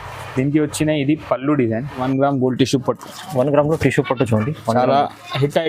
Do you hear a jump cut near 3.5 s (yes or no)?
no